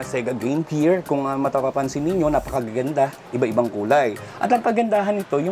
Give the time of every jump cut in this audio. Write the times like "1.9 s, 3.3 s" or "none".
4.2 s